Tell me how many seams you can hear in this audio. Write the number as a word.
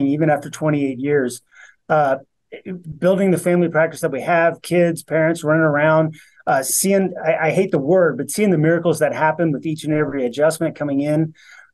zero